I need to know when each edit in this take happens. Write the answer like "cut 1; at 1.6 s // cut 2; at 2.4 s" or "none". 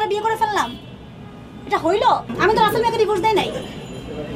cut 1; at 2.3 s